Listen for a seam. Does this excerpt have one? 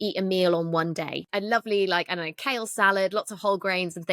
yes; 1 cut; at 1.2 s

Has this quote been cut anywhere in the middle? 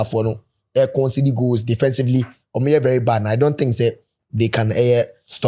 no; 0 cuts

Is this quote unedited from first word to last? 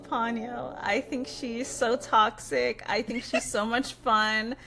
yes; 0 cuts

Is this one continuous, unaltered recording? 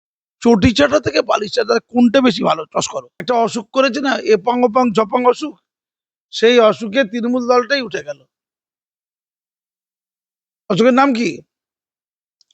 no; 1 cut; at 3.1 s

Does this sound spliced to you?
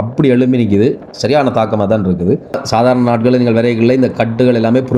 yes; 1 cut; at 2.6 s

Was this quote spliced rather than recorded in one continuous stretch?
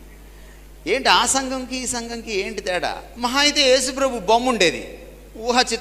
yes; 1 cut; at 3.1 s

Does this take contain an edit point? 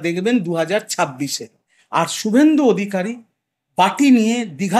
yes; 1 cut; at 1.7 s

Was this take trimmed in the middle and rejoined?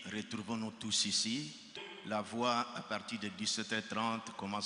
yes; 1 cut; at 1.8 s

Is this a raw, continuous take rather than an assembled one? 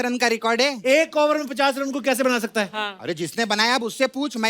yes; 0 cuts

